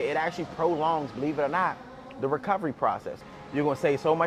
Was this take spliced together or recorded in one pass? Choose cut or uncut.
cut